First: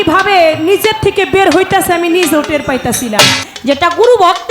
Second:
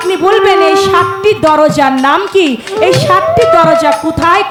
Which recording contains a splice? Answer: first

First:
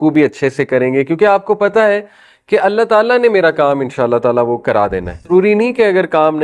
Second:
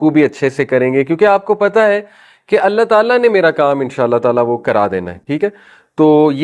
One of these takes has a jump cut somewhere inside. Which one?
first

